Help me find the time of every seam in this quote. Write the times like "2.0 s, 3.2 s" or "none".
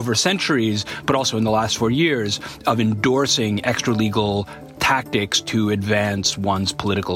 none